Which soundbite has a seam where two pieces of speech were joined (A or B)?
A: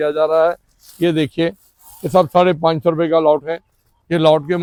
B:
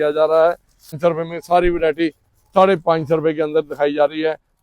B